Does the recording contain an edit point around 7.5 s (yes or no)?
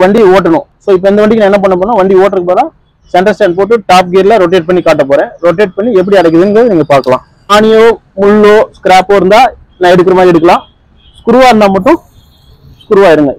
yes